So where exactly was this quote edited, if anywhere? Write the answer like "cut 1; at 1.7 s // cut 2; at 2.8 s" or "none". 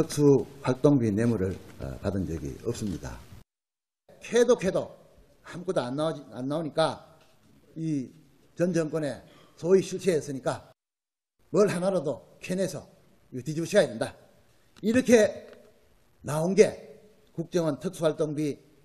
none